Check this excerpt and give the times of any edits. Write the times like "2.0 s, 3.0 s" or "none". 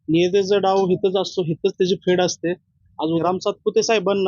3.2 s